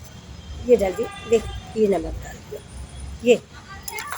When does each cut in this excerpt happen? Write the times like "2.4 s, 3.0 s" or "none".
none